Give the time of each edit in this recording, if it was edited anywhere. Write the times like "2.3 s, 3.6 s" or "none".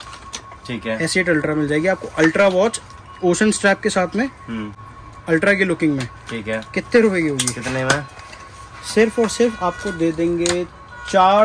none

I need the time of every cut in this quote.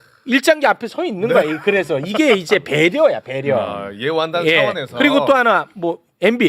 none

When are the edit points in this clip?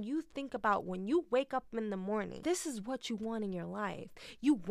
2.4 s

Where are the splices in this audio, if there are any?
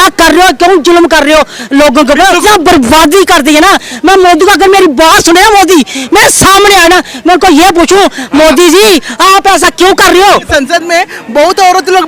2.4 s, 10.5 s

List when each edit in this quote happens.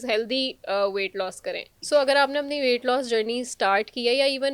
1.7 s

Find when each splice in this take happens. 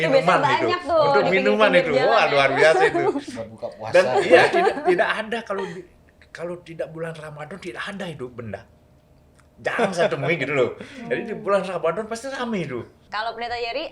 13.0 s

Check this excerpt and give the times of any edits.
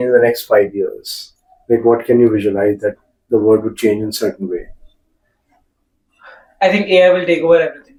none

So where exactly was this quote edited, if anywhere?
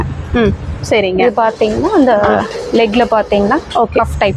none

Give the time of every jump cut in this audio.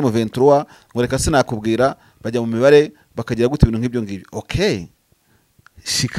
none

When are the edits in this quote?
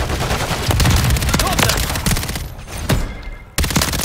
none

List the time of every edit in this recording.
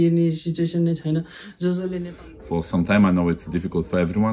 1.9 s

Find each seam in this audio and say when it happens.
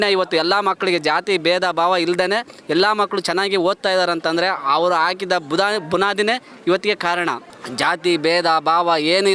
none

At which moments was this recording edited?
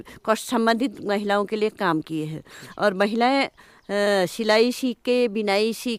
none

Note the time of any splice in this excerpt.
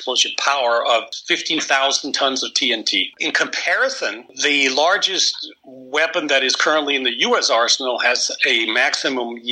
1.2 s, 3.1 s, 4.3 s

